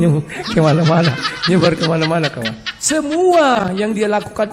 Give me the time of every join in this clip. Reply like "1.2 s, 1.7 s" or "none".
none